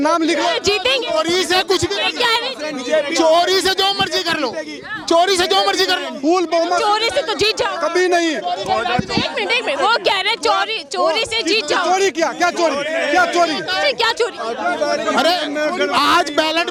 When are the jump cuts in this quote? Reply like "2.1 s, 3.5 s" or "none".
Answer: none